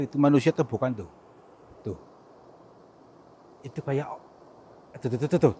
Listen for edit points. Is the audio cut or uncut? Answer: uncut